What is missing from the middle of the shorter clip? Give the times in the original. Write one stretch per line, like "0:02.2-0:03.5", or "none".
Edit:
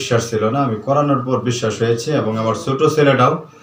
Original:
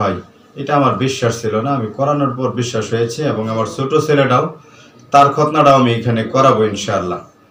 none